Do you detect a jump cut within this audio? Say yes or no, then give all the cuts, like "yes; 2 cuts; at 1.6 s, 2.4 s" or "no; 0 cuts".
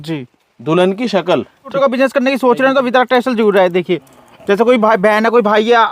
yes; 1 cut; at 1.7 s